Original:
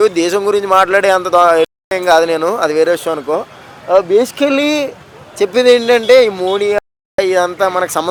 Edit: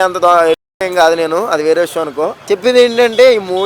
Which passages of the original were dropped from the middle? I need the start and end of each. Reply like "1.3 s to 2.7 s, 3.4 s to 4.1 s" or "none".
3.5 s to 5.3 s